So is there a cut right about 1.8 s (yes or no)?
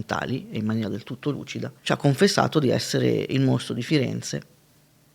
yes